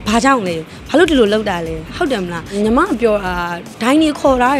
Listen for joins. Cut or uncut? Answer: cut